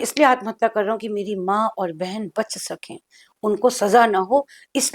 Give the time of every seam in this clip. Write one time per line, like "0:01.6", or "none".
none